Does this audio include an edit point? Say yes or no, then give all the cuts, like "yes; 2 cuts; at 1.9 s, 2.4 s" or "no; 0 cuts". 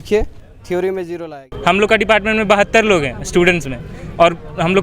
yes; 1 cut; at 1.4 s